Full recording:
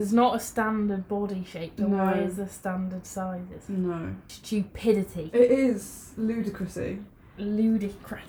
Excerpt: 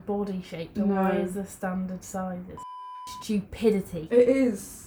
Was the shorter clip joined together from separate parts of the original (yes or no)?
yes